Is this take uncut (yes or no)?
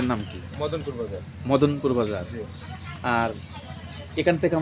yes